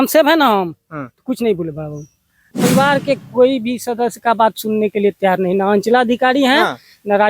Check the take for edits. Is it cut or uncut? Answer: cut